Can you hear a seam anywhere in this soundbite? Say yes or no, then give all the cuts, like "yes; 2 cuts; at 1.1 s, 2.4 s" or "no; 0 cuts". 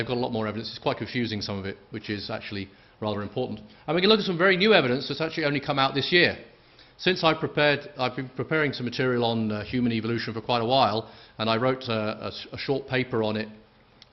yes; 1 cut; at 11.4 s